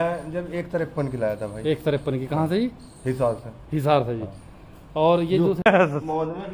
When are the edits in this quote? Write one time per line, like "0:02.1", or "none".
0:05.6